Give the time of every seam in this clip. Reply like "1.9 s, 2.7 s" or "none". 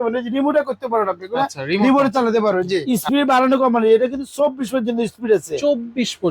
2.8 s